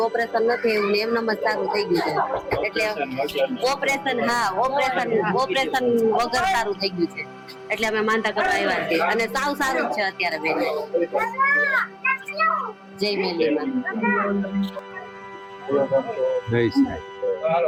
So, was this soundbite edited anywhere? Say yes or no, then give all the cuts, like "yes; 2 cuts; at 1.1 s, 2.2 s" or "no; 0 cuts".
no; 0 cuts